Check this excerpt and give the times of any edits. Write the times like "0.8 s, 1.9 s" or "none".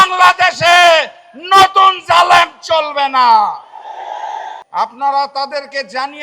4.6 s